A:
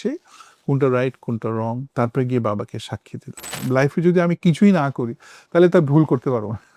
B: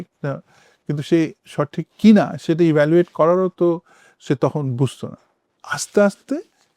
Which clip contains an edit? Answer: A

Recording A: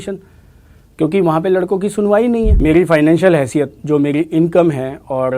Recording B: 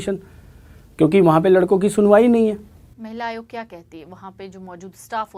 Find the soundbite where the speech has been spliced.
A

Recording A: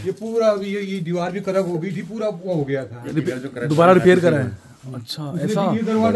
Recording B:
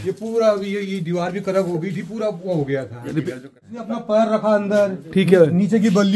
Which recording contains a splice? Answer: B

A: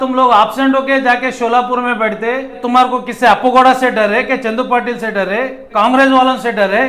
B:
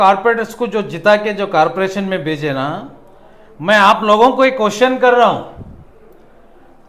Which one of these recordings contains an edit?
A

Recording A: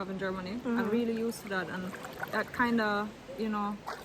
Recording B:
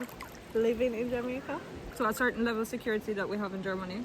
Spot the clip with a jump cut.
B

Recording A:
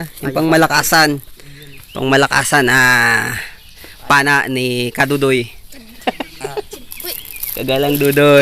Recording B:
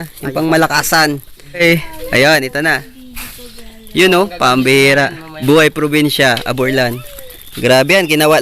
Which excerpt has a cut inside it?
B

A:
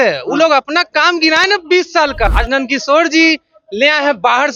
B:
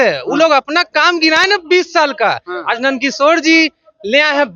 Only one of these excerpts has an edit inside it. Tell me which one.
A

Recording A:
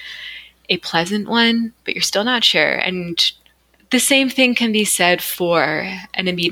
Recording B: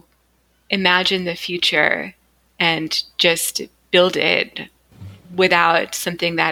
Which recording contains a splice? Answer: A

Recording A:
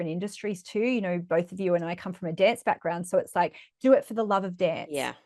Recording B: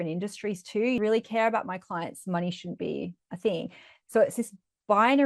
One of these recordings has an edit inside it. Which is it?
B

